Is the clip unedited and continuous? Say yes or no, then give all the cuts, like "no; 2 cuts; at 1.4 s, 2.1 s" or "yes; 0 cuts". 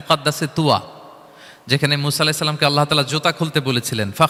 yes; 0 cuts